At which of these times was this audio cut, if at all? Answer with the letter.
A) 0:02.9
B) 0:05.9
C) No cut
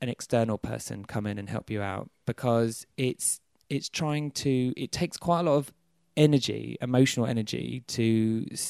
C